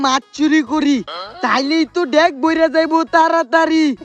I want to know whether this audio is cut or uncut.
uncut